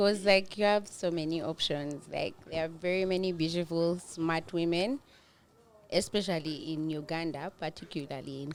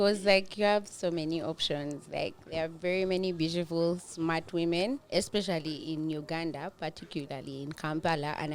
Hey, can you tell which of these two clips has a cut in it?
second; 1 cut; at 5.0 s

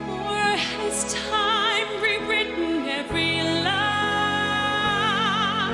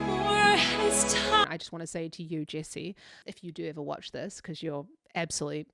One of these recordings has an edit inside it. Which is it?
second; 2 cuts; at 1.4 s, 3.2 s

